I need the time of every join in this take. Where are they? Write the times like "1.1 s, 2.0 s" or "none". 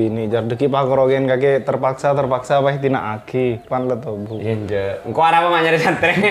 none